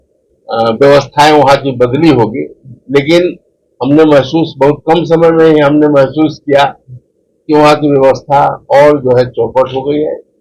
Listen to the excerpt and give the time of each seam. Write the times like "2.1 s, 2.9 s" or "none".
none